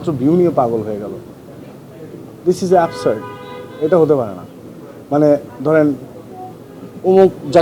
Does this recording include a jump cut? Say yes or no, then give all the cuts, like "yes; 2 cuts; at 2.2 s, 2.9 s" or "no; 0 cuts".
no; 0 cuts